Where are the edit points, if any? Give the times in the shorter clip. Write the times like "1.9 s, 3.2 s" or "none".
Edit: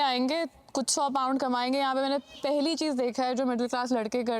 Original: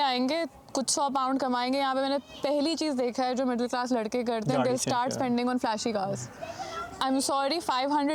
none